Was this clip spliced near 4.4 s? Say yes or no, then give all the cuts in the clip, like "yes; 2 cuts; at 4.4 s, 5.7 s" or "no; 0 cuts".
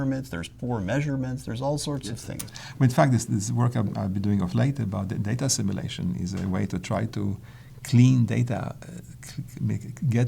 no; 1 cut; at 2.4 s